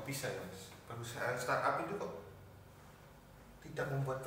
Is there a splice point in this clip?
no; 0 cuts

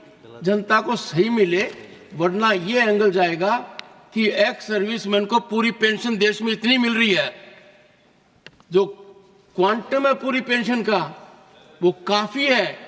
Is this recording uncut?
yes; 0 cuts

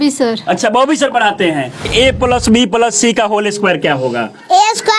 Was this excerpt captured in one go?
no; 1 cut; at 1.9 s

